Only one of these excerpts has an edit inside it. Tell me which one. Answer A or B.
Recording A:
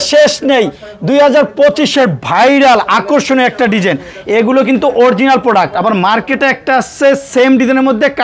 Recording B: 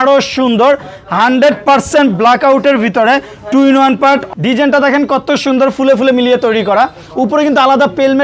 B